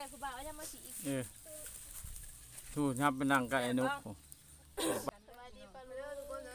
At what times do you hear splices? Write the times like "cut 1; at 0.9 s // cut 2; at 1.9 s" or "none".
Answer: cut 1; at 5.1 s